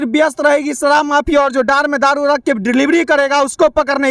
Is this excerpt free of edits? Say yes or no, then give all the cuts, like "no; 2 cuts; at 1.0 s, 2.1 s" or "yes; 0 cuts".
yes; 0 cuts